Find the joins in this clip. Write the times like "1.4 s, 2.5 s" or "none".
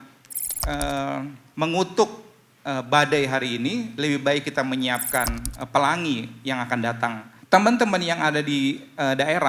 1.4 s, 7.3 s